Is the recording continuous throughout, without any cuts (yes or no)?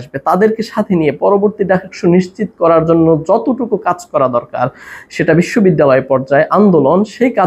yes